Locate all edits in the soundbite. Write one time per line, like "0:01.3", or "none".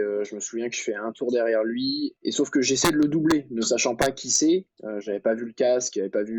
0:02.2